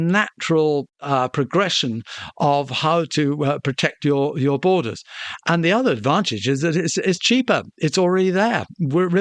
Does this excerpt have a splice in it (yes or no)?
no